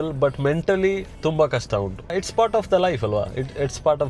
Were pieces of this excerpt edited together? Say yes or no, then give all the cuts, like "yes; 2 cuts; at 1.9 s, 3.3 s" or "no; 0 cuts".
yes; 1 cut; at 2.1 s